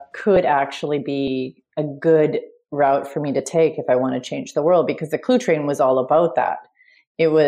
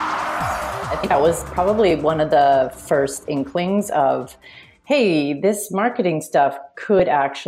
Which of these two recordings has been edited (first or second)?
second